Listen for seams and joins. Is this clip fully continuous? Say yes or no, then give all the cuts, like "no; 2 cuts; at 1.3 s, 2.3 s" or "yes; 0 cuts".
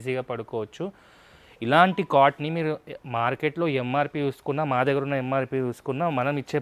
yes; 0 cuts